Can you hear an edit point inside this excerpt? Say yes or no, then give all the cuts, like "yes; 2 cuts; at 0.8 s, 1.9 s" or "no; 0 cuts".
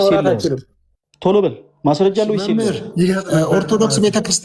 yes; 1 cut; at 2.5 s